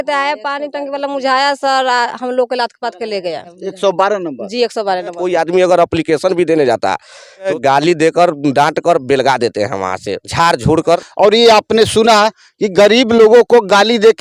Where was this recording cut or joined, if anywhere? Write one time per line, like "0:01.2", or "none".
0:03.6
0:05.2
0:07.5
0:11.1